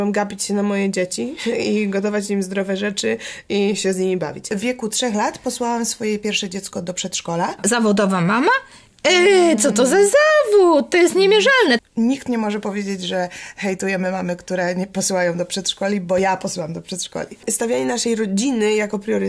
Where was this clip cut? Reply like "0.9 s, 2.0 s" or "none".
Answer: 4.5 s, 7.6 s, 11.8 s, 17.5 s